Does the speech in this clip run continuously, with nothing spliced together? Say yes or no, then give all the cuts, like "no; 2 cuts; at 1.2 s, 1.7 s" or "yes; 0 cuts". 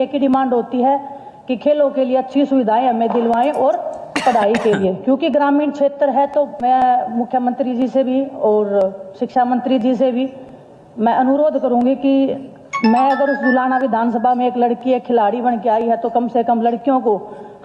yes; 0 cuts